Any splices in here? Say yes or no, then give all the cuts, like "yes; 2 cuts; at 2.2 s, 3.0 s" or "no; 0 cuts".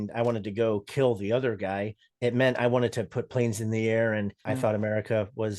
yes; 1 cut; at 4.4 s